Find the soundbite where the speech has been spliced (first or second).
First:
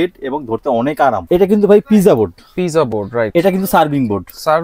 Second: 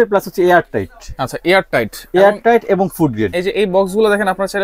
first